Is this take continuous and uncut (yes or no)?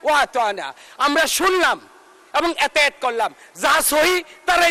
yes